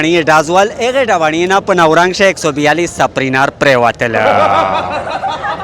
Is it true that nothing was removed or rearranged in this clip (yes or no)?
yes